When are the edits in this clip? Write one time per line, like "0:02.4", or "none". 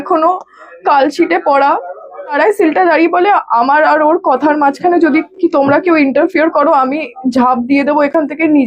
0:02.4

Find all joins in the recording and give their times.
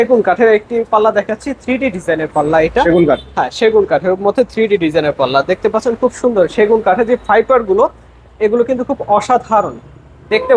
none

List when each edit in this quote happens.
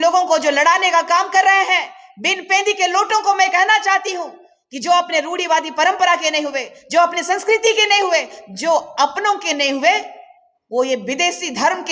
none

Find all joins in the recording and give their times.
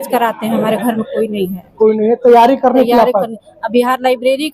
none

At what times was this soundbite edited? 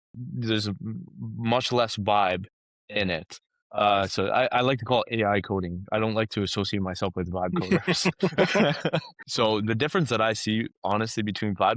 0:09.2

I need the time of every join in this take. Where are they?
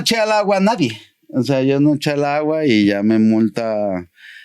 none

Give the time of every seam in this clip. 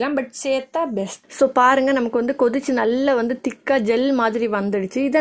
0:01.2

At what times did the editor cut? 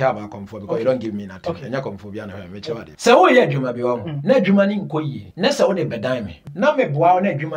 0:02.9
0:04.1
0:05.2
0:06.4

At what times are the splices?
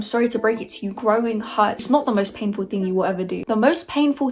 none

